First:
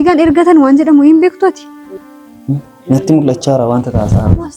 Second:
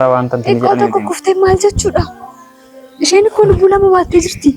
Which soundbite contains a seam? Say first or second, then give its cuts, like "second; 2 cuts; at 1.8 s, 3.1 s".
first; 1 cut; at 1.8 s